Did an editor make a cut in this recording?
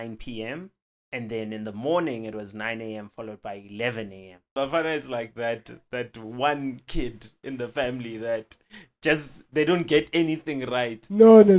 yes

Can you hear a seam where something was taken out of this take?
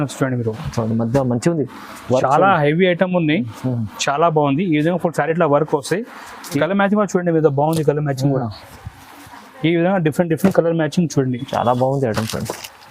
yes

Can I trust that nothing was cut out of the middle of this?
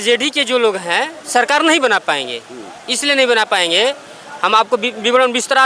yes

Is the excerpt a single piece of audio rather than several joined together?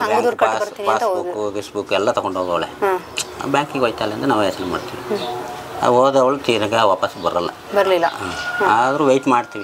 yes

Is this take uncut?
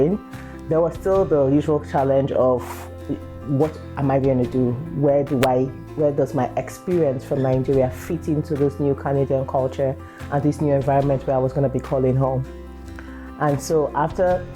yes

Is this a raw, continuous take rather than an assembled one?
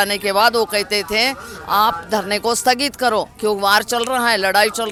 yes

